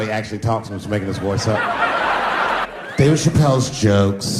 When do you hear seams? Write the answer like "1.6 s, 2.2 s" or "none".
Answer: 2.7 s